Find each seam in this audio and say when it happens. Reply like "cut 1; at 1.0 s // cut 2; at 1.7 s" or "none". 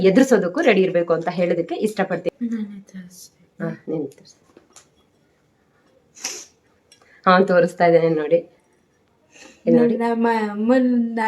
cut 1; at 2.2 s